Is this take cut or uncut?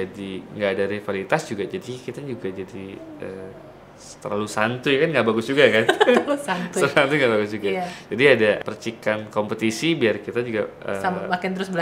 uncut